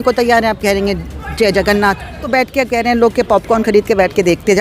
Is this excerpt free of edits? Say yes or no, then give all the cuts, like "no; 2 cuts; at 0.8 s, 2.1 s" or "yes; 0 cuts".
no; 1 cut; at 2.1 s